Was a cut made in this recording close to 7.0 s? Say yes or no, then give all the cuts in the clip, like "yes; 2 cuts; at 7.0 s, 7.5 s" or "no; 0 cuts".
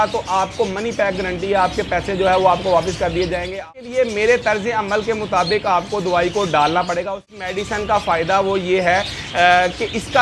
yes; 2 cuts; at 3.6 s, 7.0 s